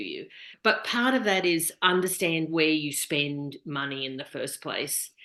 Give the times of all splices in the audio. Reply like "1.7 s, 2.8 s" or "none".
none